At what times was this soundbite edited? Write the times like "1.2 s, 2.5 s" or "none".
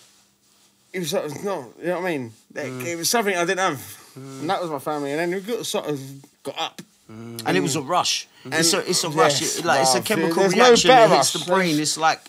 6.3 s